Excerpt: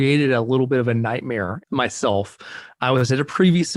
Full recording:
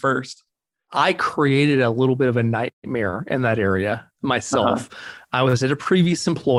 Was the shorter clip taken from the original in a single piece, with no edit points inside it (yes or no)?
no